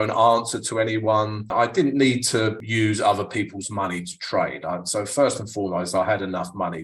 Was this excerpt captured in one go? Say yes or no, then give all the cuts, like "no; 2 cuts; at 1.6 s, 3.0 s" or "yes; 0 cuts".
no; 2 cuts; at 1.5 s, 2.6 s